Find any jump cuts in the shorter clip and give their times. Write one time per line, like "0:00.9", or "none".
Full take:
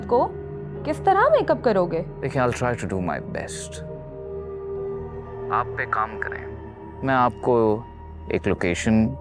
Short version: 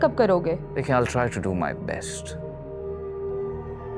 none